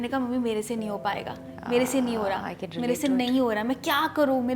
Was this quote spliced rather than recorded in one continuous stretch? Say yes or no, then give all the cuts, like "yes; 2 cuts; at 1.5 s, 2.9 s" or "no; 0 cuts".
no; 0 cuts